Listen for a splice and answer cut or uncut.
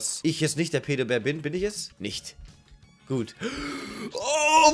uncut